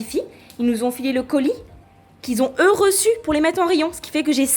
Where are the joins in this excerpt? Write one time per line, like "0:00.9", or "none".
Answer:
none